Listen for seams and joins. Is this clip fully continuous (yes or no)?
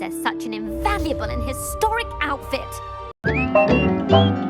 no